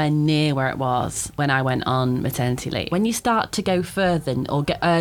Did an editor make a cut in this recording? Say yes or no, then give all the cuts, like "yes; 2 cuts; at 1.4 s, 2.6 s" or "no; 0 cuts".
yes; 2 cuts; at 1.3 s, 2.9 s